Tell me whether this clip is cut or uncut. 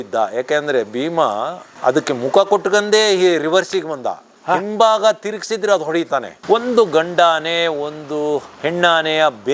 cut